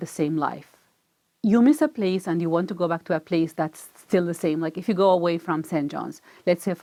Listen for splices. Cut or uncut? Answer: uncut